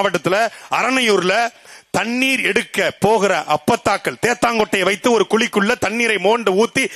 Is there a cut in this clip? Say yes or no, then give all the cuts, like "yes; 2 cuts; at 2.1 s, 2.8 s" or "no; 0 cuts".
no; 0 cuts